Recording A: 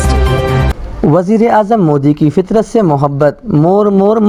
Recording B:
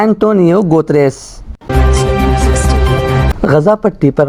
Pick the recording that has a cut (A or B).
B